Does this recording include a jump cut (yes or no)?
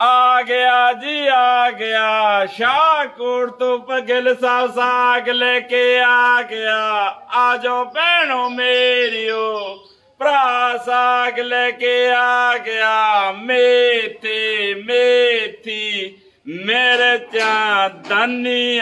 no